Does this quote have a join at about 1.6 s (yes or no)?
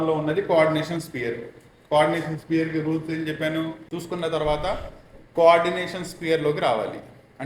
no